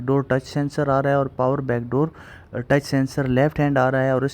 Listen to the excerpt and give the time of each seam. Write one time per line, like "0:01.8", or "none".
none